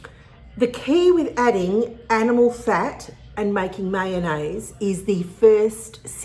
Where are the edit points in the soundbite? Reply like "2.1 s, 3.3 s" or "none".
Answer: none